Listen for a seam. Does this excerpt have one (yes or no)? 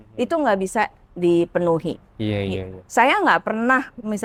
no